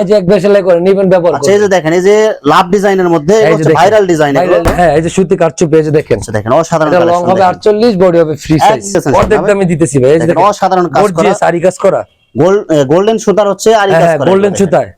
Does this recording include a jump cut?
yes; 2 cuts; at 4.6 s, 8.9 s

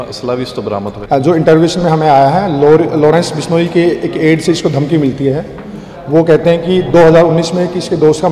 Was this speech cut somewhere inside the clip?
yes; 1 cut; at 0.9 s

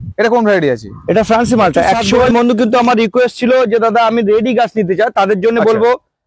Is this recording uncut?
no; 1 cut; at 2.2 s

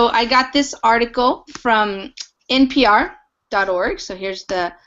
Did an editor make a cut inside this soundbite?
yes; 1 cut; at 3.0 s

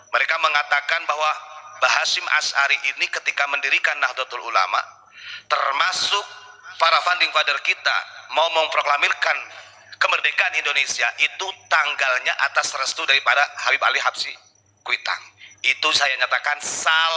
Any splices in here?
no; 0 cuts

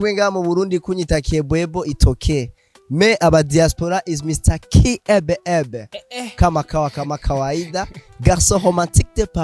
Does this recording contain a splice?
no; 0 cuts

